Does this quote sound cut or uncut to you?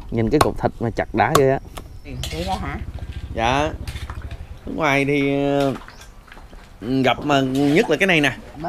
cut